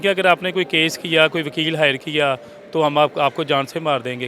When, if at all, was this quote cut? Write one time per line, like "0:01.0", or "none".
none